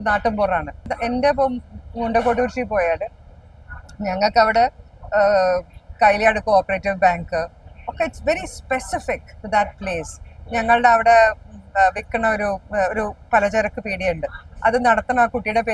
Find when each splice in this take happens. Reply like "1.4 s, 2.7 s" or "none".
0.9 s